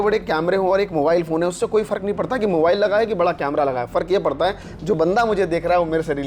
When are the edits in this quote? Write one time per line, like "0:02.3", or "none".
none